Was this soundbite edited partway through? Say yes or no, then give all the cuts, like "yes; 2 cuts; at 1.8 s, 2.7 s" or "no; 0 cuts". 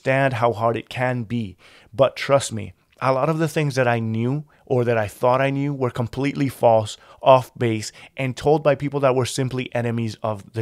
no; 0 cuts